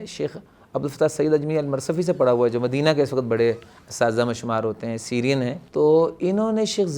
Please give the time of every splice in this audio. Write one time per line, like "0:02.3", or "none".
0:05.6

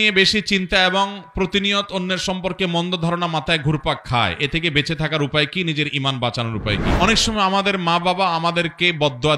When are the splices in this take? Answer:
0:06.9

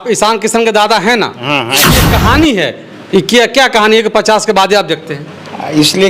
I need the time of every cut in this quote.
0:02.0

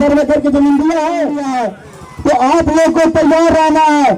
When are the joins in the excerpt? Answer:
0:01.4

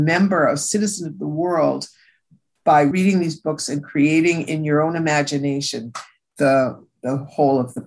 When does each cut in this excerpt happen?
0:02.9

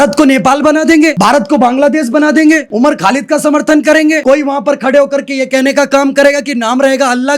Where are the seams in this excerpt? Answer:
0:01.1
0:02.7
0:04.2

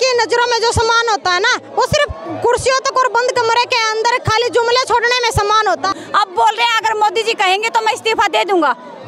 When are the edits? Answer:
0:05.9

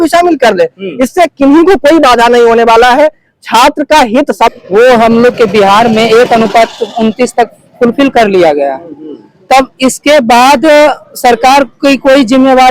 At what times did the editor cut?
0:04.5

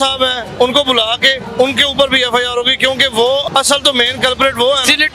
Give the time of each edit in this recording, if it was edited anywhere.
0:01.4
0:03.5

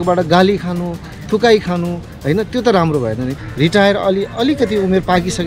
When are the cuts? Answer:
0:03.3

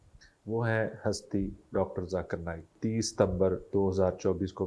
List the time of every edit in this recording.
0:02.7

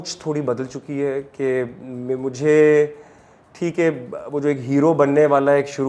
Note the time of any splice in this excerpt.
none

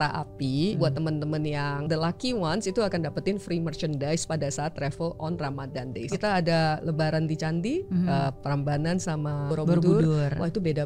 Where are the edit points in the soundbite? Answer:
0:00.8
0:01.8
0:06.1
0:09.5

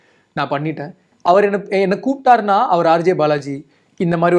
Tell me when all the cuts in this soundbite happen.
0:01.0

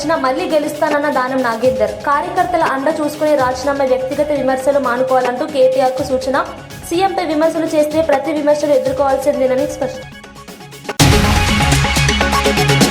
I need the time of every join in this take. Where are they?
0:10.0

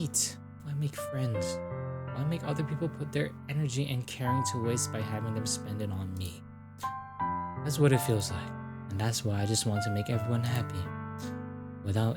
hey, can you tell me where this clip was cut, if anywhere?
none

